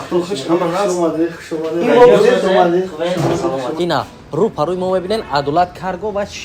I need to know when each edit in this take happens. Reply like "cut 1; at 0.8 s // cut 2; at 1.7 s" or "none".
cut 1; at 3.7 s